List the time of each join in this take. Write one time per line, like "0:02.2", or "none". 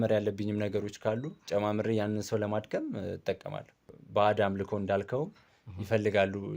0:03.9